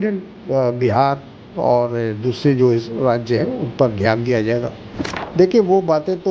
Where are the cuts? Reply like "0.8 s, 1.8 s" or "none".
4.8 s